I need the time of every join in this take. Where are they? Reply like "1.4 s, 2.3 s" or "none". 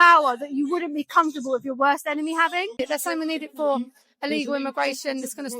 2.8 s